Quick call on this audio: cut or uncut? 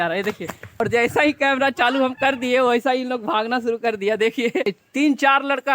cut